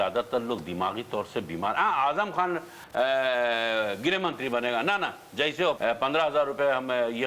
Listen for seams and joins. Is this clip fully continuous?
no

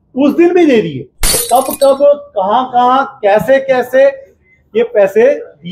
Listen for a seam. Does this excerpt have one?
yes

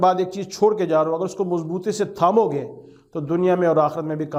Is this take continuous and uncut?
yes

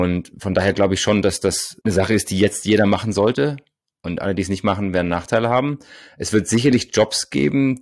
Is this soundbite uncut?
yes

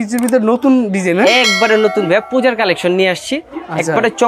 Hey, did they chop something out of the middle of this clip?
no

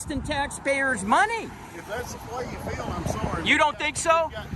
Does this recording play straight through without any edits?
yes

